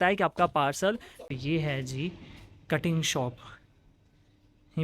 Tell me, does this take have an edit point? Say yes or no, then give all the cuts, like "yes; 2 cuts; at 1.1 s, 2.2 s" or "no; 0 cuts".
yes; 1 cut; at 1.2 s